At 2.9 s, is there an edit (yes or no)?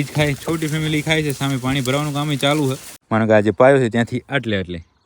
yes